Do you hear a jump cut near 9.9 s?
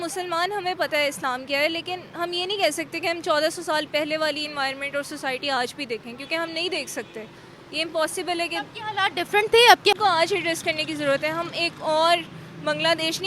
yes; 1 cut; at 9.9 s

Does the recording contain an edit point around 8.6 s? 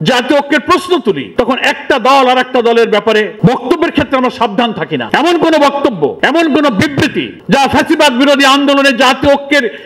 no; 5 cuts; at 1.2 s, 3.3 s, 5.1 s, 6.2 s, 7.3 s

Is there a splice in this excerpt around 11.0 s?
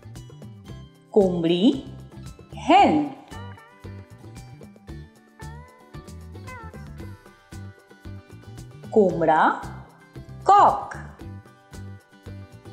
yes; 4 cuts; at 1.1 s, 3.8 s, 8.2 s, 11.0 s

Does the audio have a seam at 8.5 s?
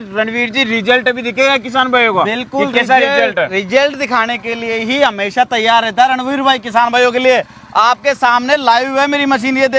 no; 0 cuts

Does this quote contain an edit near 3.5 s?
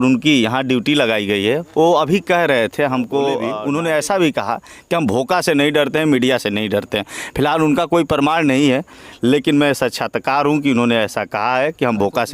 yes; 1 cut; at 3.5 s

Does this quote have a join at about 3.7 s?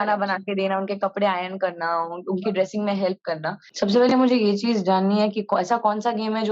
yes; 1 cut; at 3.7 s

